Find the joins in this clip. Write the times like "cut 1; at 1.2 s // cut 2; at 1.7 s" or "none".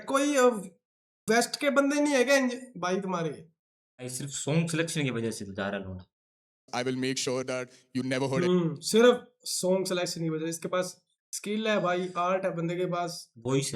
cut 1; at 4.3 s